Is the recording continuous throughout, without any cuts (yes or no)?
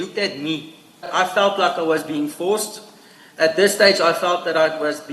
no